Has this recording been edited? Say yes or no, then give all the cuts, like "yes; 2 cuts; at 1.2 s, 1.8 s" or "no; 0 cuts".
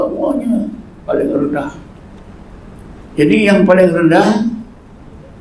no; 0 cuts